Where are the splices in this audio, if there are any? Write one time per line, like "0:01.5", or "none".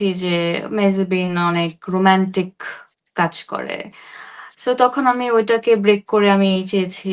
none